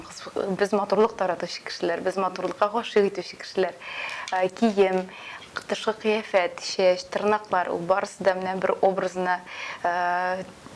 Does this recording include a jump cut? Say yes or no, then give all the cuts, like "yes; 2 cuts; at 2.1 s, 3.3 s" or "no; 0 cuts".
no; 0 cuts